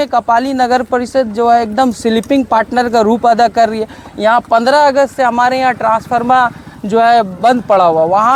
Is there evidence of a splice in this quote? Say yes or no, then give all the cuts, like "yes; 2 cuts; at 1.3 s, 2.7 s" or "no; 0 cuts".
no; 0 cuts